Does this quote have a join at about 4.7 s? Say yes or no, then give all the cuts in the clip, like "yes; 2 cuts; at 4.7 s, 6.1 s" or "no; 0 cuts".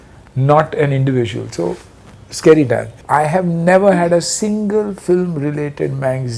no; 1 cut; at 3.0 s